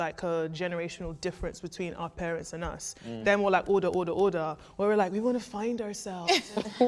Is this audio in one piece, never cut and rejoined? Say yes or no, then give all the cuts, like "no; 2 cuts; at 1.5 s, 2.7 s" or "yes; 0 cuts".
yes; 0 cuts